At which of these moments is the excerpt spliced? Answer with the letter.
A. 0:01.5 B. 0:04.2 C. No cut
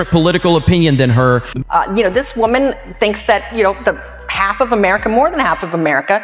A